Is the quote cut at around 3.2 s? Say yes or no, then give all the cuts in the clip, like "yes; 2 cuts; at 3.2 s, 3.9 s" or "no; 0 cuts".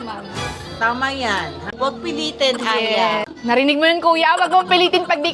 yes; 2 cuts; at 1.6 s, 3.2 s